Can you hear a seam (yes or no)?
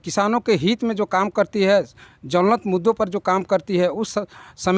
no